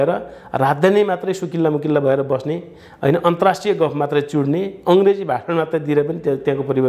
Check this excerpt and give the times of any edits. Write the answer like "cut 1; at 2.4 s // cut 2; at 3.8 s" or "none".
none